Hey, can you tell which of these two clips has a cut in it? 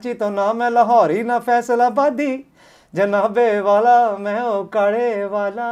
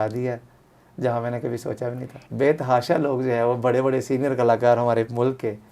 second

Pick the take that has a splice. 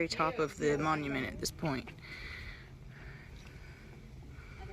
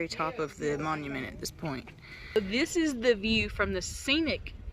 second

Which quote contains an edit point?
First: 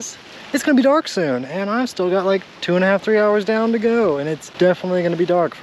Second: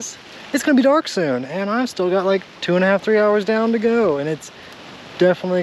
first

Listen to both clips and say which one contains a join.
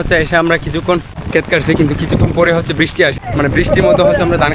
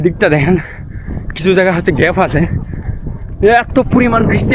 first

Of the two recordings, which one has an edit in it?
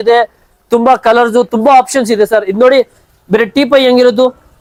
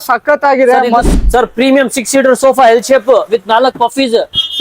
second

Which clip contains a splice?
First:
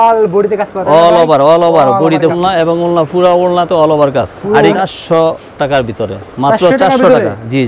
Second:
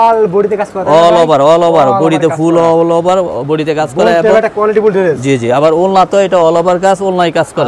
first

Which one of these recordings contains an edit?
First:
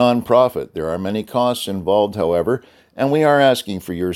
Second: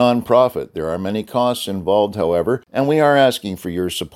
second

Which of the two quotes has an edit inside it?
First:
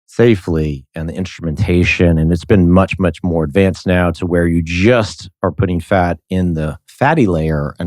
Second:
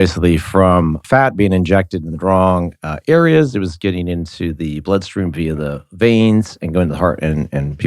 second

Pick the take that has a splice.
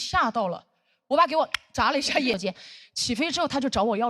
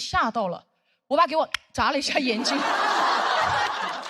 first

